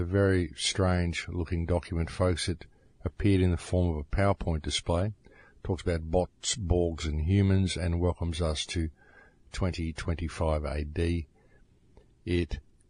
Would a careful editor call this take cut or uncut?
cut